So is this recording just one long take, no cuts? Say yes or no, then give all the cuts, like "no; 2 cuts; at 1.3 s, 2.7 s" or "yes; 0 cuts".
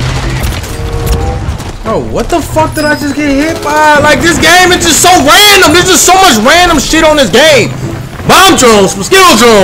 yes; 0 cuts